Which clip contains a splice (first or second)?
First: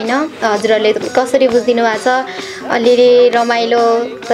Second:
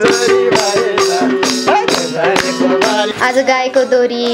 second